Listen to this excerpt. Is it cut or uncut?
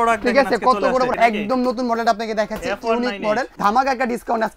cut